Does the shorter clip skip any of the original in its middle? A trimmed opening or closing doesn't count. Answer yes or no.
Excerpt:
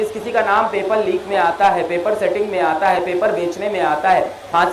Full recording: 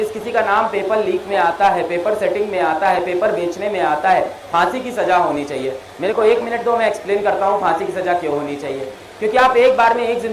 no